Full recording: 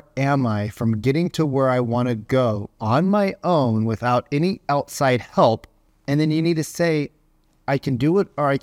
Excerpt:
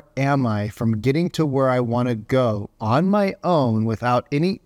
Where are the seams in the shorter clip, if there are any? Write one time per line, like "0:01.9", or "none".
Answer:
none